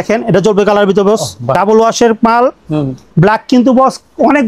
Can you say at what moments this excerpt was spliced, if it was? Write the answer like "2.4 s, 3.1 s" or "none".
1.6 s

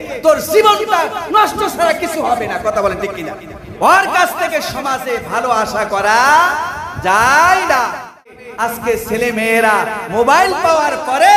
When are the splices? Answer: 8.4 s

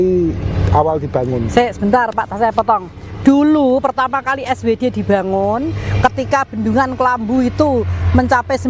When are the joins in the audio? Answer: none

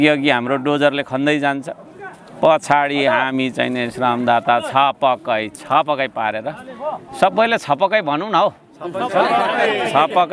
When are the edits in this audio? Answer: none

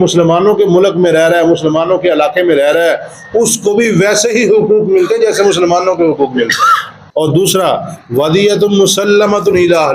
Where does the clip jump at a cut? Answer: 6.9 s

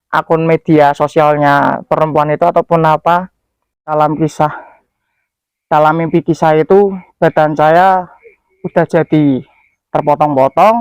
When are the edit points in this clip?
3.8 s

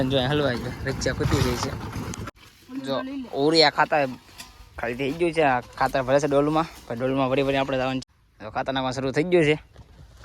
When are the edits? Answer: 2.2 s, 8.0 s

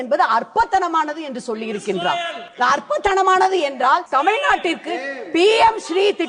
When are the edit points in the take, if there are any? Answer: 2.4 s, 4.1 s

